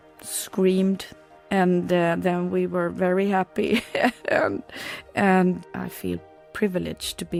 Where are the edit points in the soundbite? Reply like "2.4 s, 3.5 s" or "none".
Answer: none